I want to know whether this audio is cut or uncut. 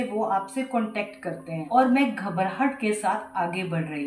cut